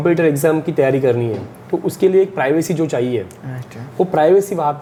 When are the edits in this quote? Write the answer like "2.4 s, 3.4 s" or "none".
none